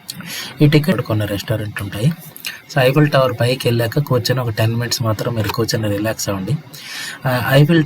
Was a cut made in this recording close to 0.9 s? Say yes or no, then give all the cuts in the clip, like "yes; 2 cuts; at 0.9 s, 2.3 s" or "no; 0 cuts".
yes; 1 cut; at 0.9 s